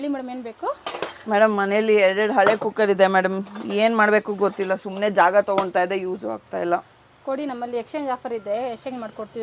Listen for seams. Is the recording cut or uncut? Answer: uncut